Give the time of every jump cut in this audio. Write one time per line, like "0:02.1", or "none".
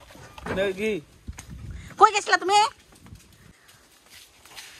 0:03.5